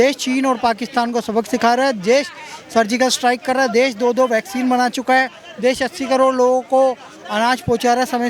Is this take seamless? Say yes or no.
yes